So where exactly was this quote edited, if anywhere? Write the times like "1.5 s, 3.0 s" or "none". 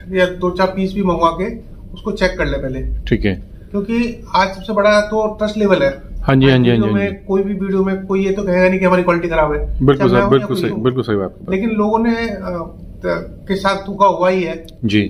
none